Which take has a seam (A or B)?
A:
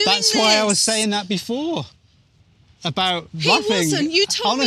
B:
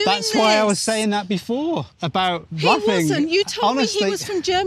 B